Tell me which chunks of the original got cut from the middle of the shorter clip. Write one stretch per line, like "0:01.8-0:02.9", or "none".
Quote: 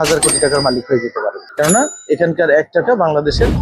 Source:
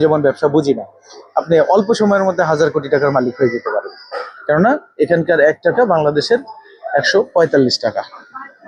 0:03.9-0:04.3